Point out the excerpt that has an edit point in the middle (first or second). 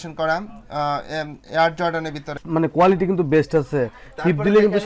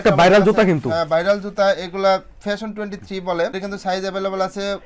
first